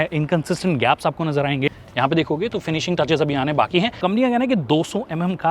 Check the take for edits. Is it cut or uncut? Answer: cut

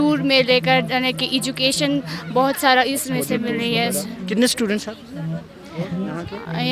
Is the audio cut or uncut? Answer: uncut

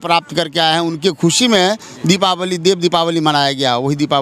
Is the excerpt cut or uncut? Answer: uncut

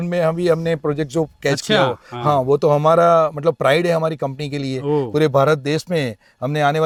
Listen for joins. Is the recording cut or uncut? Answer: uncut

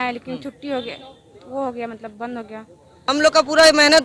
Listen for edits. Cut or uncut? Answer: cut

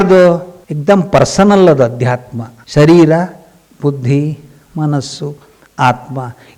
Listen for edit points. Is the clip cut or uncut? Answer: uncut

